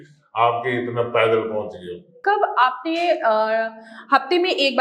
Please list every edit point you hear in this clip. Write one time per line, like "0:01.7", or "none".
0:02.2